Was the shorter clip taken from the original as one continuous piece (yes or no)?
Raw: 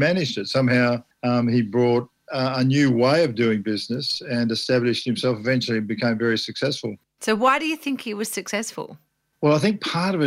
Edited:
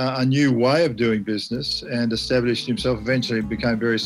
yes